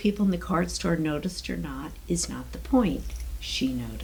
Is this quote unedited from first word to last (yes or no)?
yes